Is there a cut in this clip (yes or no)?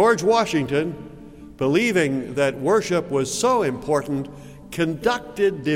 no